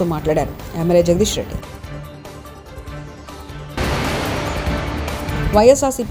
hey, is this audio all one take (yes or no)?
yes